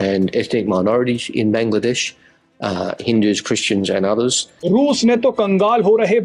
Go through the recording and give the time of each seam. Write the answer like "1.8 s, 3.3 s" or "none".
4.5 s